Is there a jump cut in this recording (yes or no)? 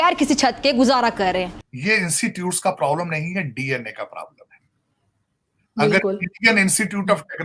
yes